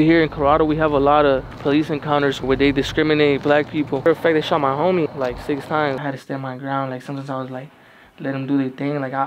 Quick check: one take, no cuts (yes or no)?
no